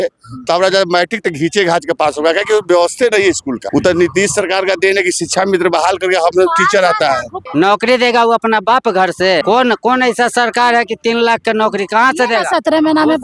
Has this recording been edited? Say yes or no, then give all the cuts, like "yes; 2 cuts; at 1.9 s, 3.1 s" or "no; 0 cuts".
yes; 3 cuts; at 3.6 s, 7.4 s, 9.4 s